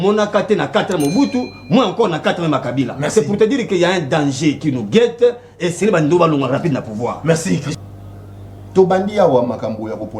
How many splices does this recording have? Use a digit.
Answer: 1